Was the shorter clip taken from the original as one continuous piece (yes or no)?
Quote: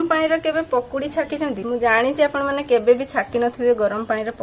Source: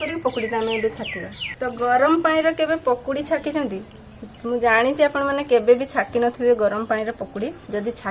no